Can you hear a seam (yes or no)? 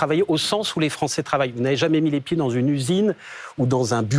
no